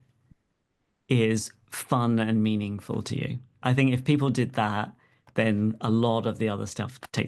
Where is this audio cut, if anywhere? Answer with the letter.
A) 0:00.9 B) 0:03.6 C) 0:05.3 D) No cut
B